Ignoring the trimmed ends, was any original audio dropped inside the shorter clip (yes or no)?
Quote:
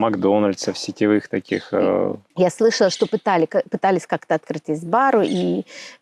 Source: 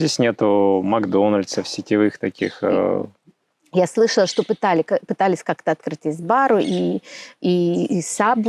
yes